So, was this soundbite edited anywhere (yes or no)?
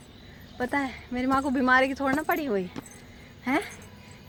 no